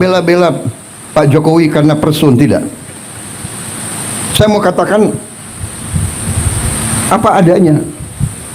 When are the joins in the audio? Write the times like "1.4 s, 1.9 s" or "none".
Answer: none